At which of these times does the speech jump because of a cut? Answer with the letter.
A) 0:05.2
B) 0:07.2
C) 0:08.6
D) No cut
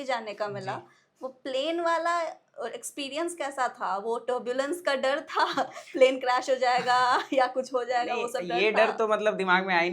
D